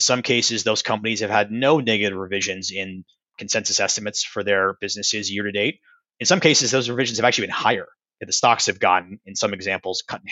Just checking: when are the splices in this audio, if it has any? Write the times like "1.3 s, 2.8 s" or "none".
none